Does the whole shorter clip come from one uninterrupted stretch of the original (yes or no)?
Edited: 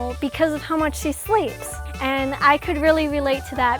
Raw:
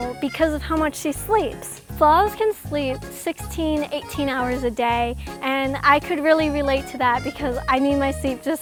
no